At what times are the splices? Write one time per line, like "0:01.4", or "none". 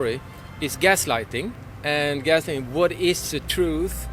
0:01.6